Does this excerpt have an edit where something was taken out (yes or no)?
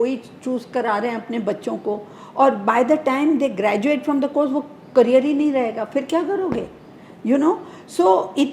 no